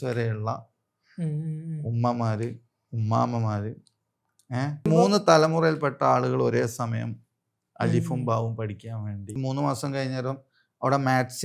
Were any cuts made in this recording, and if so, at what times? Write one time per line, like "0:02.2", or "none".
0:04.9
0:09.4

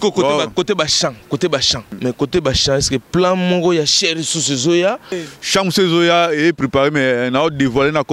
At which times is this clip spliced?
0:01.9
0:05.3

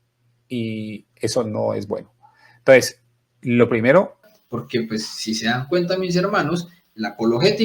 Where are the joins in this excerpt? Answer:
0:04.4

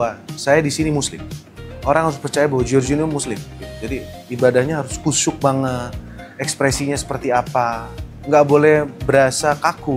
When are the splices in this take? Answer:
none

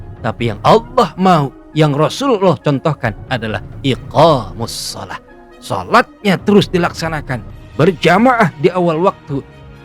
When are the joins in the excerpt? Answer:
none

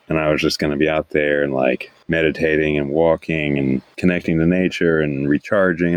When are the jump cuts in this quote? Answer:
0:01.9
0:03.9

